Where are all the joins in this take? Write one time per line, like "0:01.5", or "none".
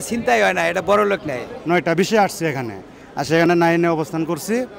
0:01.5